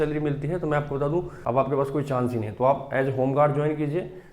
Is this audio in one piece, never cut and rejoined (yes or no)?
no